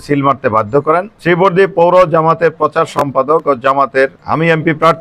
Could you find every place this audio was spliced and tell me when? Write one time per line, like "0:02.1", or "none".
0:01.1
0:04.2